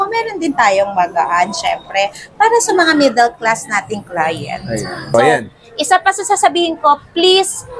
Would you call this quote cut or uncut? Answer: cut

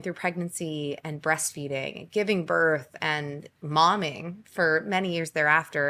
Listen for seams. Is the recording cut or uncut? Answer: uncut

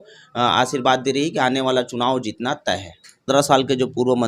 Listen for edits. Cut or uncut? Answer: cut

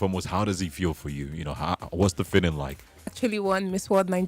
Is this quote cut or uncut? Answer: cut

